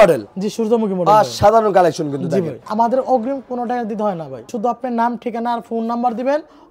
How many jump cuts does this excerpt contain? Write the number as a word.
two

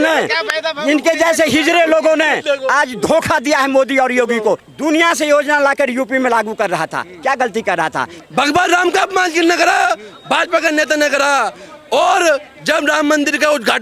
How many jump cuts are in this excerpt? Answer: two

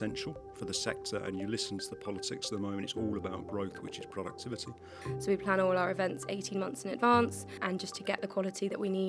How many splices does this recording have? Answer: two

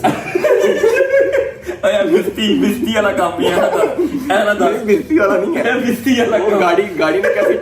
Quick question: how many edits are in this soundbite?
zero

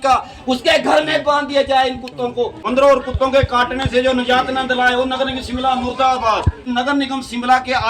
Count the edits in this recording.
two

